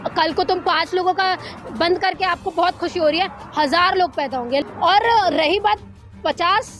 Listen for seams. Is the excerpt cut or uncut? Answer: cut